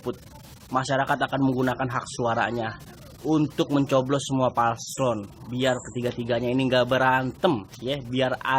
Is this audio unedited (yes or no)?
yes